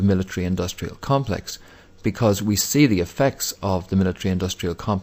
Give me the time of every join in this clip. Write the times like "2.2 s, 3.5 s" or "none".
none